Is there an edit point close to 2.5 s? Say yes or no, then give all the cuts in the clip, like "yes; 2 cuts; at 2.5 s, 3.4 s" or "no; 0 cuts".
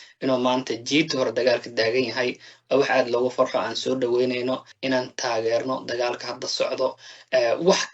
no; 1 cut; at 4.7 s